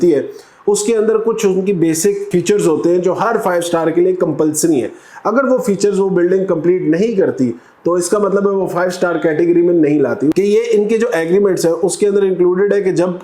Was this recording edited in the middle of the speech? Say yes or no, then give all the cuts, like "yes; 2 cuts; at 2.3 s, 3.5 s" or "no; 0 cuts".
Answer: yes; 2 cuts; at 2.3 s, 10.3 s